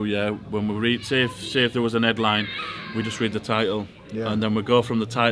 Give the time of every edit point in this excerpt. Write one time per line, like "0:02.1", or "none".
none